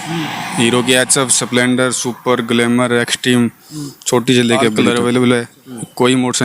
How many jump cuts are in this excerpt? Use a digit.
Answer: 1